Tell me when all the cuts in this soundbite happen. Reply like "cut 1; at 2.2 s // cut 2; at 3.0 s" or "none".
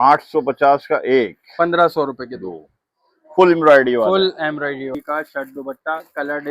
cut 1; at 4.9 s